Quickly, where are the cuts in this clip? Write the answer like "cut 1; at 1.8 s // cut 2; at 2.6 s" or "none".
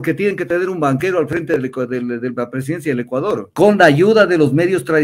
cut 1; at 3.5 s